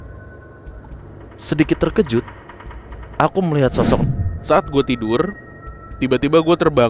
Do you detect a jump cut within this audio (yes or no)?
yes